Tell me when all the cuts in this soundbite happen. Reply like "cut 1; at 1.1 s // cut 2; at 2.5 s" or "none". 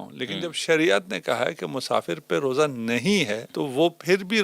cut 1; at 3.4 s